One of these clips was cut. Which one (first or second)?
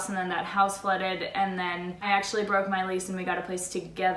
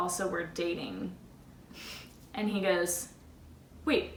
first